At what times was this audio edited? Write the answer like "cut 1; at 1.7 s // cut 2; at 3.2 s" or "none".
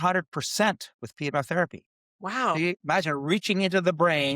cut 1; at 2.5 s